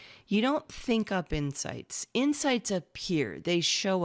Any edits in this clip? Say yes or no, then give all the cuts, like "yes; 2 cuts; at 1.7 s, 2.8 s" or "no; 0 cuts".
no; 0 cuts